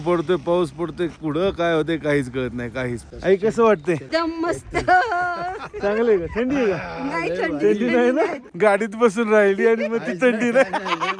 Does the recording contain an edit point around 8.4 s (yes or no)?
yes